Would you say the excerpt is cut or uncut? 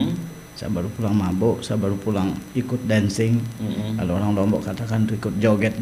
uncut